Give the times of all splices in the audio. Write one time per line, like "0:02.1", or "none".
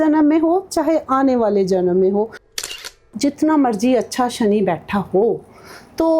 0:02.7